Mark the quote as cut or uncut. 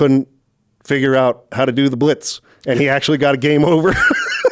uncut